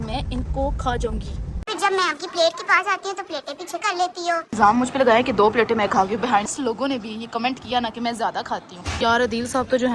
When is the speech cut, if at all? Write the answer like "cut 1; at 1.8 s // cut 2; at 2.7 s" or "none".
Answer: cut 1; at 1.6 s // cut 2; at 4.6 s // cut 3; at 6.5 s // cut 4; at 8.8 s